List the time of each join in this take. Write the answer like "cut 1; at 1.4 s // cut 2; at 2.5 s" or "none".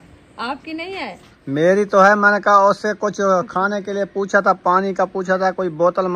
cut 1; at 1.3 s